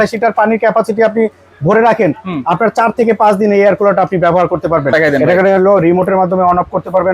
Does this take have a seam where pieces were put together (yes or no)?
yes